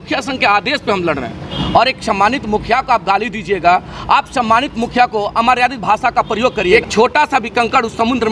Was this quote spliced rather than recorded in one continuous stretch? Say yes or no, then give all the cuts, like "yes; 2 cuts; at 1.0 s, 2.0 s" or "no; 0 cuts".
yes; 2 cuts; at 1.5 s, 6.7 s